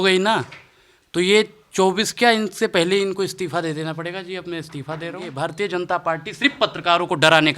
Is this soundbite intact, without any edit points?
no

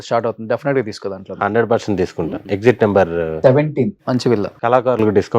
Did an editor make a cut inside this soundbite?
yes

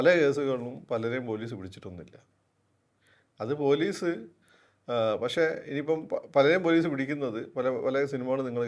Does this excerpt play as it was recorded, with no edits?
yes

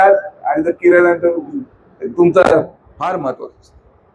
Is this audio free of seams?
no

